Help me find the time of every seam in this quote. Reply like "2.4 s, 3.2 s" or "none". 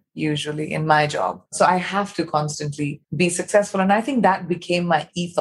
1.4 s, 3.0 s